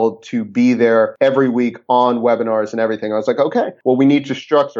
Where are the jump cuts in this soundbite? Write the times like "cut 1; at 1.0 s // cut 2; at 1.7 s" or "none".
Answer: cut 1; at 1.1 s